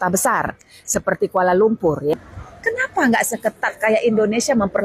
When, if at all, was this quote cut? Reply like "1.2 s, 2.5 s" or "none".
2.1 s